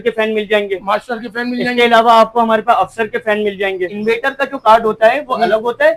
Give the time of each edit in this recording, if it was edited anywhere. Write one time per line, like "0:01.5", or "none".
0:03.9